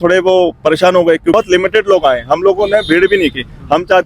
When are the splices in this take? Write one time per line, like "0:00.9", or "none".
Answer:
0:01.3